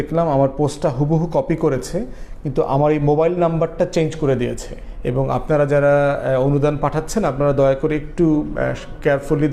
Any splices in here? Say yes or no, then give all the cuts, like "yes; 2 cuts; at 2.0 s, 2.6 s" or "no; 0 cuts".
no; 0 cuts